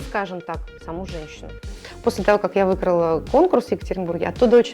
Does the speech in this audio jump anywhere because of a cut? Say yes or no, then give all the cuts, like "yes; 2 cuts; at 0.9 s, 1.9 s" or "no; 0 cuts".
yes; 1 cut; at 1.7 s